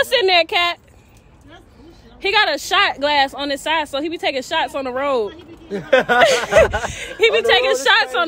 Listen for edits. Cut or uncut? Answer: uncut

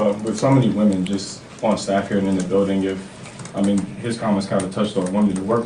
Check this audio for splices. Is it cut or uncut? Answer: uncut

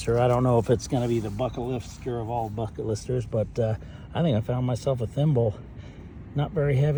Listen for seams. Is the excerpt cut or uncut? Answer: uncut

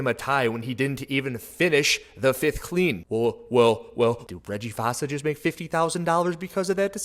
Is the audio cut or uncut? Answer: cut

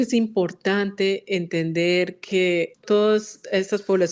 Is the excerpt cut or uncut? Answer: cut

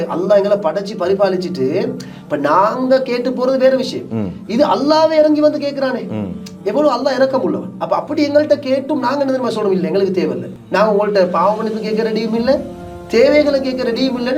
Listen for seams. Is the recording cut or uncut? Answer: uncut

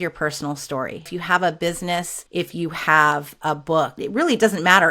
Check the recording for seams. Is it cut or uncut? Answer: cut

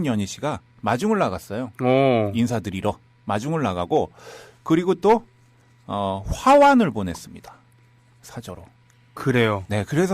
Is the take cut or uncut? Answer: cut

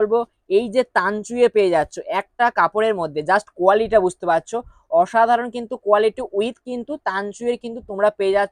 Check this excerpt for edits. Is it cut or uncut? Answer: uncut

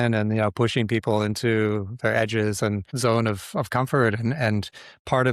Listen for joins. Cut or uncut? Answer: cut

